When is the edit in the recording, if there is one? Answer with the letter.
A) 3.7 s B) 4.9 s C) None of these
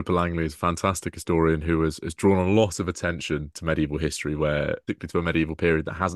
B